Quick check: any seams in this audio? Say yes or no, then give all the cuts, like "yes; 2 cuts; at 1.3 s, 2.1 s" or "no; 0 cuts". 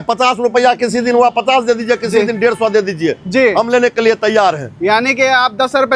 no; 0 cuts